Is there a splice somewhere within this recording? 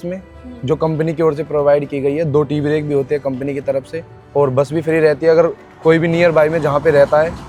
no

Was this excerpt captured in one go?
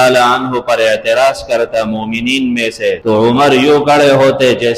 no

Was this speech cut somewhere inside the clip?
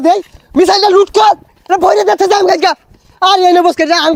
no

